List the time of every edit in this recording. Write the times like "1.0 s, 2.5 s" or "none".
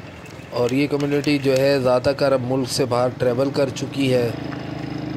none